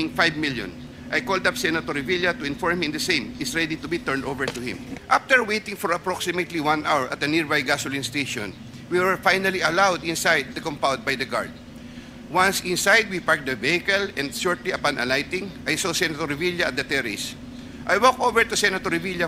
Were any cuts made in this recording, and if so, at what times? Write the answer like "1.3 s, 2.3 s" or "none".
4.9 s